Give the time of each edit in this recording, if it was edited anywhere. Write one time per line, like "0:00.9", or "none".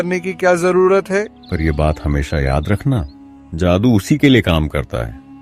0:01.4